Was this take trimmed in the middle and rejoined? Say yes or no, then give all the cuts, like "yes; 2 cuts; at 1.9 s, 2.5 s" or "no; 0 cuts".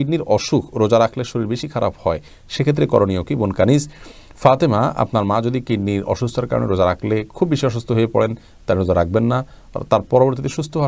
no; 0 cuts